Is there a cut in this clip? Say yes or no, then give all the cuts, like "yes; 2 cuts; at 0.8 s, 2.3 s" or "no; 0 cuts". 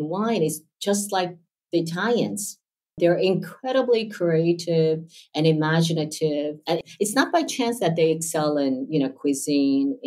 no; 0 cuts